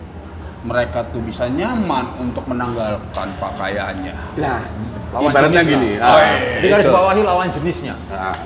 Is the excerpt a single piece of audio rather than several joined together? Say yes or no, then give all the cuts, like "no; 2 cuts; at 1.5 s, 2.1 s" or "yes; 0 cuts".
yes; 0 cuts